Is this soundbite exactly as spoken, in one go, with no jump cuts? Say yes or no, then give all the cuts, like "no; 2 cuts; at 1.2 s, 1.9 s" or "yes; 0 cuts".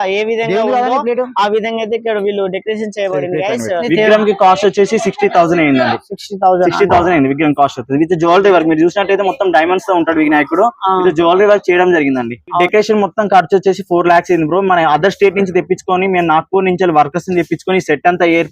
no; 2 cuts; at 3.9 s, 12.6 s